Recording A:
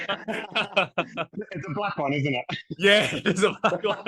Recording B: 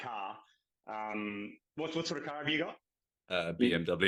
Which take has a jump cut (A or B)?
A